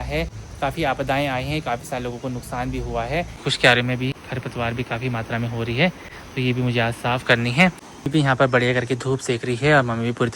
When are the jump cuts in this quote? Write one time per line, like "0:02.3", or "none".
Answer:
0:03.3
0:07.9